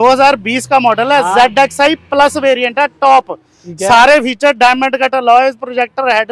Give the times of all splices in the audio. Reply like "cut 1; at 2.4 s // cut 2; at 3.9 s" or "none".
none